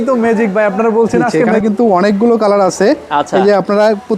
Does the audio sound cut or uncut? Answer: cut